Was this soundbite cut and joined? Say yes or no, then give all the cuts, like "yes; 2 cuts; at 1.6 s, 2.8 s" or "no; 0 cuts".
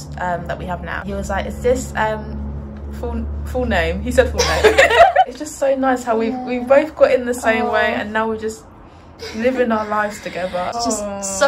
yes; 3 cuts; at 1.0 s, 5.4 s, 10.7 s